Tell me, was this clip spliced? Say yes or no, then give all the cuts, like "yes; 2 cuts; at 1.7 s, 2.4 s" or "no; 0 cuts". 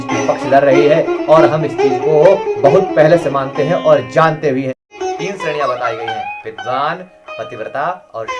yes; 1 cut; at 4.9 s